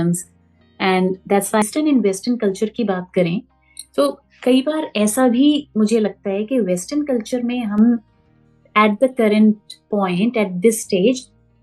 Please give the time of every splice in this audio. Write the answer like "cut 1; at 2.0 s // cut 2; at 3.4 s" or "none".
cut 1; at 1.6 s